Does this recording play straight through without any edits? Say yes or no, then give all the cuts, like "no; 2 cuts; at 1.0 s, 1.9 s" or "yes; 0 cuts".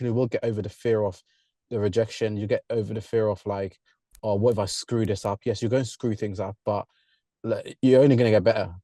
yes; 0 cuts